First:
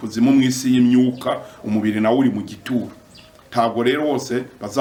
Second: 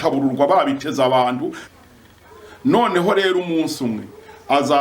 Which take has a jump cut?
second; 1 cut; at 1.6 s

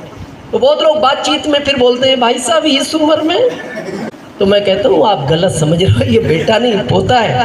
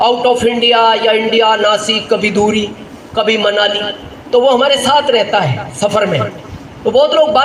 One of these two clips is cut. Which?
first; 1 cut; at 4.0 s

